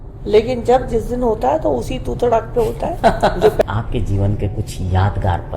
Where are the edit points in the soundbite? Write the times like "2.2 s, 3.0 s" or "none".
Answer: 3.6 s